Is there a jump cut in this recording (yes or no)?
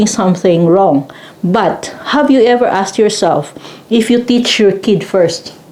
no